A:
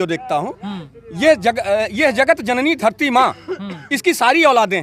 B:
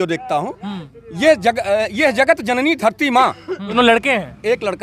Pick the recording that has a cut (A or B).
B